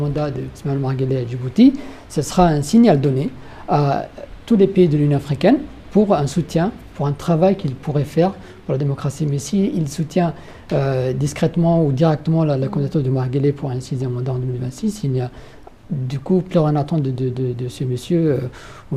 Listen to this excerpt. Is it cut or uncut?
uncut